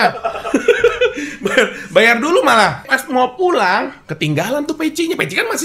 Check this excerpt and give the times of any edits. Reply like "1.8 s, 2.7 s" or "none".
2.9 s